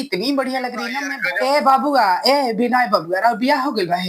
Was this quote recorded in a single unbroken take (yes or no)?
no